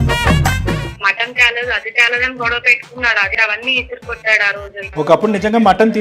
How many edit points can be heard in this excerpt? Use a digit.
3